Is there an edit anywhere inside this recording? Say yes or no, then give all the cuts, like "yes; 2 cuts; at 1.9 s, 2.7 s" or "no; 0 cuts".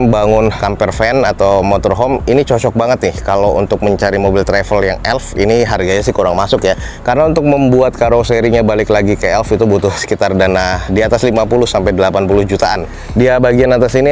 no; 0 cuts